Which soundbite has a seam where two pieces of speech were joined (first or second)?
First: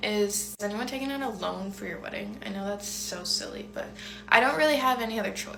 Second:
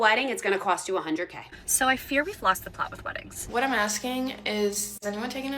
second